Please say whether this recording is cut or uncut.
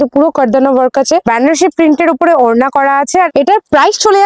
cut